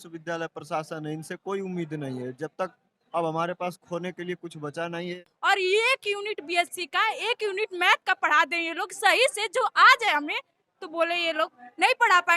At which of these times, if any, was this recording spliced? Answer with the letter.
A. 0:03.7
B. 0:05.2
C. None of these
B